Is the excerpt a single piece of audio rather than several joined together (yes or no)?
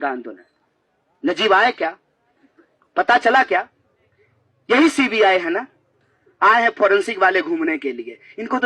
yes